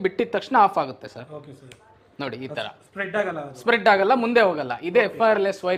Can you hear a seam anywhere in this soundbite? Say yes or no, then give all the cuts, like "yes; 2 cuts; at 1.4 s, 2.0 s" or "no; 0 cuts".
no; 0 cuts